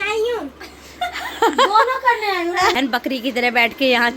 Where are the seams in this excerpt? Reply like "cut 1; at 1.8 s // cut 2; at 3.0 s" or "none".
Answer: cut 1; at 2.7 s